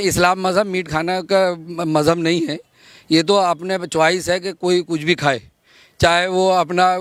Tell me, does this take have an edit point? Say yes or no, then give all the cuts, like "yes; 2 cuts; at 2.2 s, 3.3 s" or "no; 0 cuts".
no; 0 cuts